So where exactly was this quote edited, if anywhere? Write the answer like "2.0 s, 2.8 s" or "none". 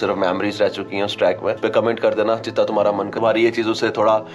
1.6 s, 3.1 s